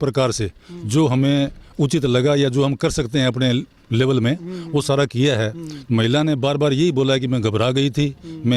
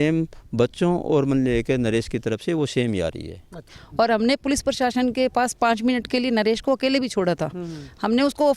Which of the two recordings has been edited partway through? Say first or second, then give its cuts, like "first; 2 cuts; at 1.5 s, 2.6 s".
second; 1 cut; at 3.8 s